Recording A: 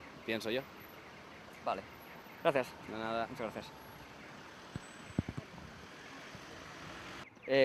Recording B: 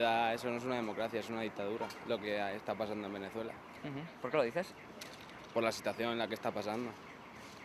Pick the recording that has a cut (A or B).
B